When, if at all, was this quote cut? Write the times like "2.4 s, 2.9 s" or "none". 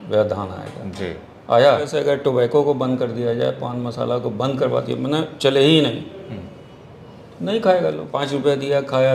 1.9 s, 8.1 s

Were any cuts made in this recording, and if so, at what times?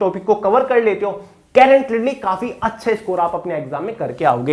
none

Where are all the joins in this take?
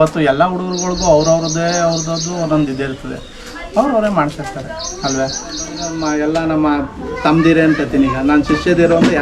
5.8 s

